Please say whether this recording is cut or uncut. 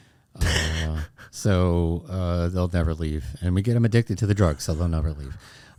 uncut